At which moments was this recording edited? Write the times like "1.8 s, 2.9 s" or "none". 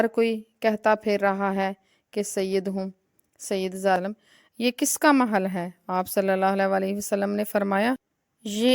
4.0 s